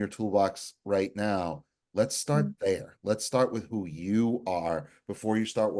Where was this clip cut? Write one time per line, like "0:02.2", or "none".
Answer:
none